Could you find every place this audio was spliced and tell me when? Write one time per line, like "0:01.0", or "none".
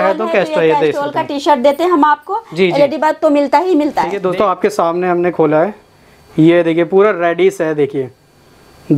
0:04.2

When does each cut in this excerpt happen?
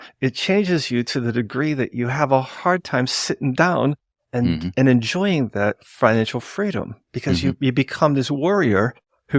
none

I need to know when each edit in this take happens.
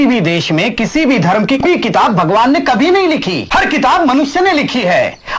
0:01.6
0:03.4

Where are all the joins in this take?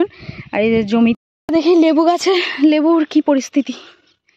0:01.2

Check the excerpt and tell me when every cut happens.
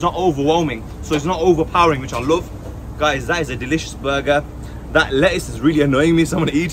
none

